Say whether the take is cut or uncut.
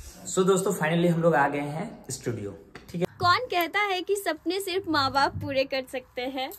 cut